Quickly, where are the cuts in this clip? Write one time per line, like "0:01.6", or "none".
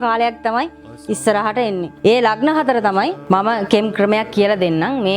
0:03.2